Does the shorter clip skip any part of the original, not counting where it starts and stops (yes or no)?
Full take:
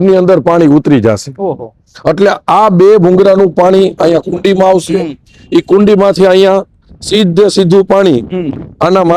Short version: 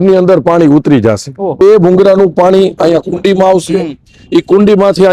yes